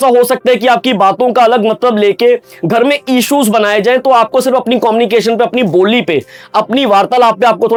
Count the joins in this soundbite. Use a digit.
0